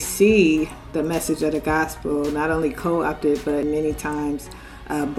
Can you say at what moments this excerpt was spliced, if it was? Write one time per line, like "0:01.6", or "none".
0:03.6